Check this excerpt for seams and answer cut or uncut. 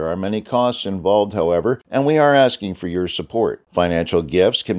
cut